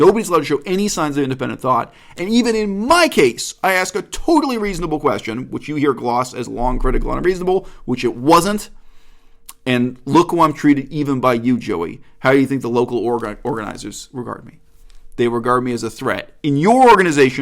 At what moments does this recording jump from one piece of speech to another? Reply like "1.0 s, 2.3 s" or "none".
none